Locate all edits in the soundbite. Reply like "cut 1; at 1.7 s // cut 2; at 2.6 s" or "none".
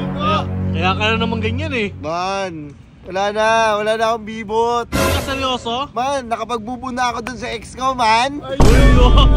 none